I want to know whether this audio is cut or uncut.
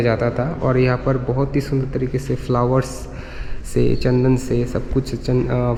uncut